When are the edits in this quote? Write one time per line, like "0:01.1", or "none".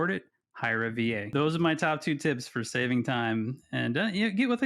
0:01.3